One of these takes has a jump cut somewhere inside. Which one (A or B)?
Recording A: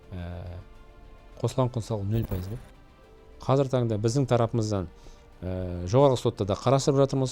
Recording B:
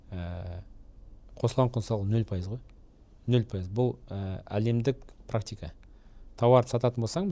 A